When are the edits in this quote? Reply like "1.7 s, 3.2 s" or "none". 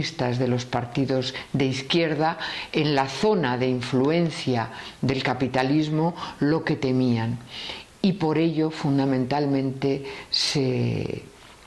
none